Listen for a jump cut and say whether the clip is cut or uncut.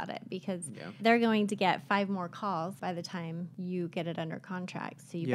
cut